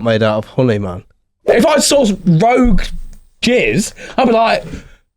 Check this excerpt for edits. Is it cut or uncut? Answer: cut